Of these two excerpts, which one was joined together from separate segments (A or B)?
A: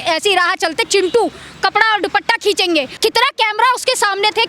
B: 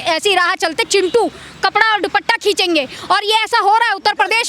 A